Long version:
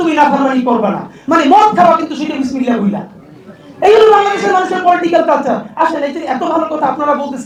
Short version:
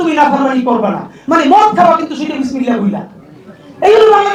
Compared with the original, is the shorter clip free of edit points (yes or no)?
yes